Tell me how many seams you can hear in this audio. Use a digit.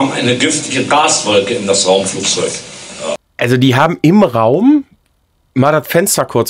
1